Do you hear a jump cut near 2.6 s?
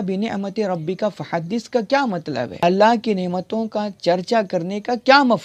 no; 0 cuts

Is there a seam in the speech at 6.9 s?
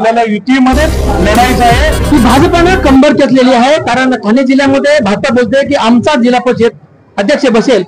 no; 1 cut; at 1.9 s

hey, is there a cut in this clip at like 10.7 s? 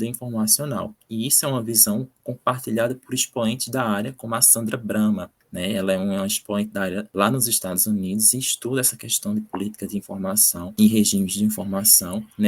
yes; 2 cuts; at 7.1 s, 10.7 s

